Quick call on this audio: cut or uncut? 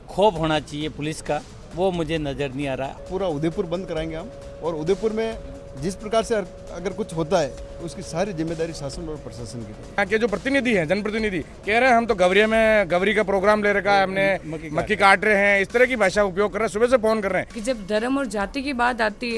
cut